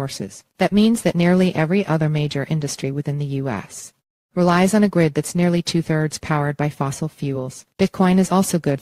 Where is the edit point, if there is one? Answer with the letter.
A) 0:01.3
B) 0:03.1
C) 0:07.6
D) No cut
C